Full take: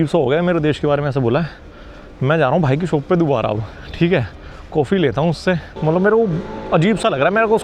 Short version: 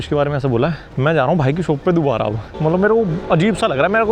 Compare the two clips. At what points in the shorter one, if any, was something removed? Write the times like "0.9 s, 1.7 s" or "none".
0.9 s, 2.5 s, 3.2 s